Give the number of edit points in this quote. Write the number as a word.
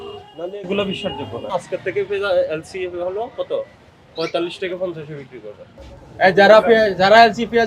two